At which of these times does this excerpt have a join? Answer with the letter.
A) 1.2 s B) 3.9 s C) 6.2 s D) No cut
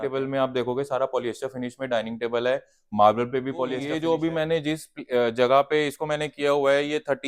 B